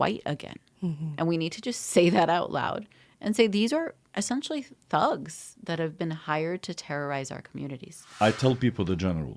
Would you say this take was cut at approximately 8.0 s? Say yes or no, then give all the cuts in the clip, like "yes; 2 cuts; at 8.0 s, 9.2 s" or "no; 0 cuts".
yes; 1 cut; at 8.0 s